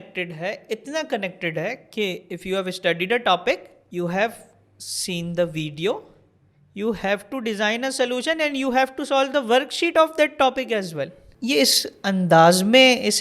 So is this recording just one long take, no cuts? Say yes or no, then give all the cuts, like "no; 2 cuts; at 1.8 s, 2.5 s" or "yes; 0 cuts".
no; 3 cuts; at 2.3 s, 3.8 s, 11.2 s